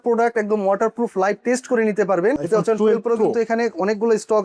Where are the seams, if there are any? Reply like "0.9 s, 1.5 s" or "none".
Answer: 2.4 s